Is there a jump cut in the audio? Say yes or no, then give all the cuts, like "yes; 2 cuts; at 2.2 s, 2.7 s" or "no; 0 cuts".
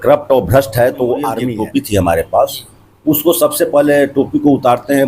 yes; 1 cut; at 1.4 s